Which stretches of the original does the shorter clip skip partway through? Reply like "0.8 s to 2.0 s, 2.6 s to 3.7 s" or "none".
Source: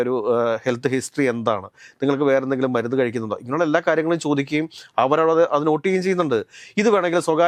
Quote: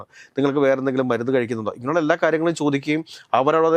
none